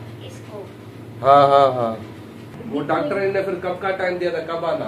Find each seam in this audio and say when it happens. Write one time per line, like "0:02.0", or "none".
0:02.6